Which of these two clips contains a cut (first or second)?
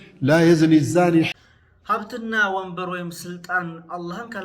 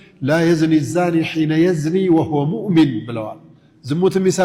first